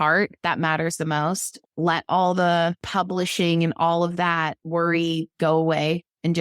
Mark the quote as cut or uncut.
cut